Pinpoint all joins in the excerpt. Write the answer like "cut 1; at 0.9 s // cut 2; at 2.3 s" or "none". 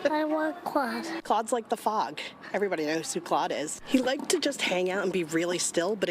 cut 1; at 1.1 s // cut 2; at 3.8 s